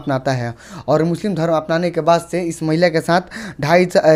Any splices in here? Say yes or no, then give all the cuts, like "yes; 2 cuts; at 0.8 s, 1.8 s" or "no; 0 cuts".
no; 0 cuts